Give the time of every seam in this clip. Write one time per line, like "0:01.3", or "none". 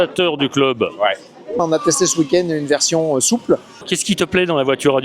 0:01.6
0:03.9